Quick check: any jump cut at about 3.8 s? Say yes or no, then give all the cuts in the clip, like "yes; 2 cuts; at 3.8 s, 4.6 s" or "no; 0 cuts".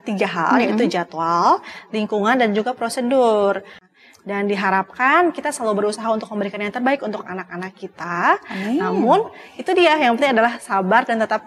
yes; 1 cut; at 3.8 s